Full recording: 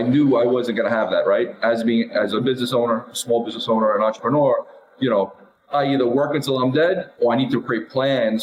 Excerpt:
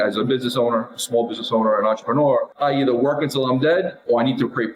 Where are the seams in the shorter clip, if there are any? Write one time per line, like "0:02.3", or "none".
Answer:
0:02.5

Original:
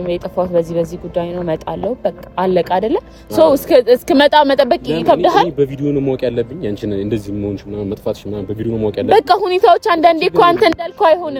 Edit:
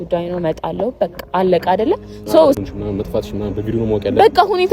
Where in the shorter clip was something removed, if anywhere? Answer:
0:02.6

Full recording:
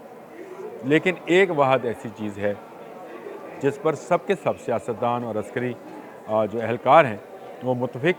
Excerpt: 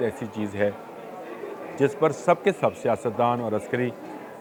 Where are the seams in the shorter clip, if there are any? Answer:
none

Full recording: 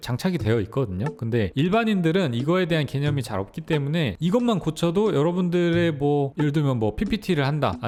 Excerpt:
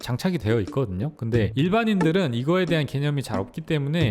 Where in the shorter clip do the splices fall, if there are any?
none

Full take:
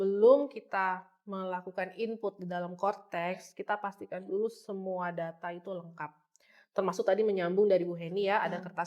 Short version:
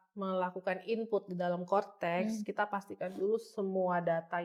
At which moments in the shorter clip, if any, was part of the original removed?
none

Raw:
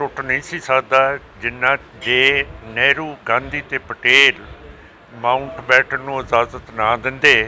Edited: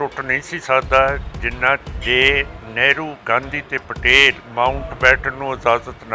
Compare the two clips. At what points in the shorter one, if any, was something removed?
0:04.4

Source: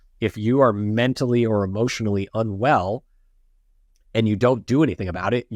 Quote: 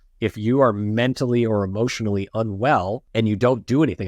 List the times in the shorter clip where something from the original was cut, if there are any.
0:03.0

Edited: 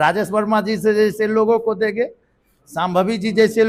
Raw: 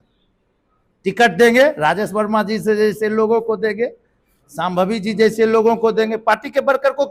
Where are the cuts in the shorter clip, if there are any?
none

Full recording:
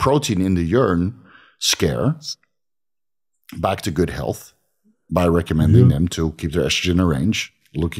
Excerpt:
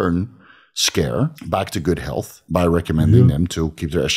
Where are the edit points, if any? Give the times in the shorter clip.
0:01.4
0:02.4

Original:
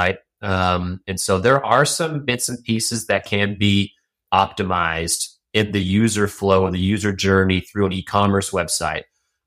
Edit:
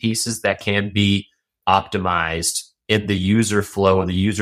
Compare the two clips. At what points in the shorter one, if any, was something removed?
none

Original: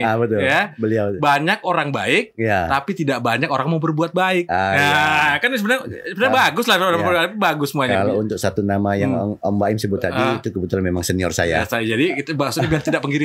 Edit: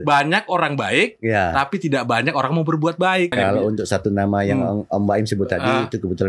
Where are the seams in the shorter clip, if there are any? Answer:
0:03.3

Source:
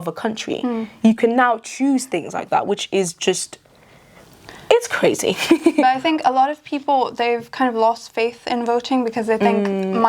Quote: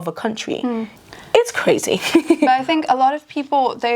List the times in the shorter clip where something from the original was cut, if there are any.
0:00.9

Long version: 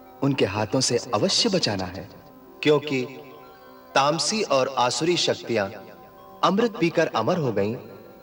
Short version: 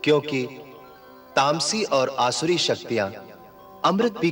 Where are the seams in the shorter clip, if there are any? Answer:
none

